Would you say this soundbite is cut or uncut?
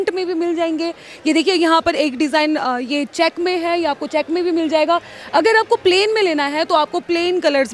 uncut